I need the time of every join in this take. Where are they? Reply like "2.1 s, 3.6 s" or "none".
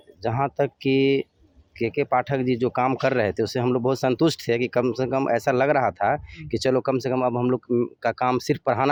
none